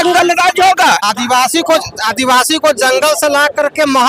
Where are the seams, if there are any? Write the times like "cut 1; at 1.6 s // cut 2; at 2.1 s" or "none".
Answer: cut 1; at 1.0 s